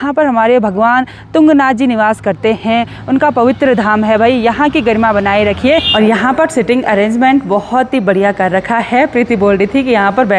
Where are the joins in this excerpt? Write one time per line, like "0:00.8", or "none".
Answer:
0:05.9

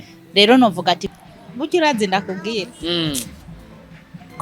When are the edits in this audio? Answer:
0:01.1

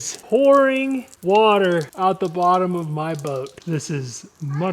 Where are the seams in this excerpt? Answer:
0:03.6

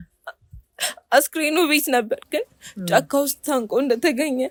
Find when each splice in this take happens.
none

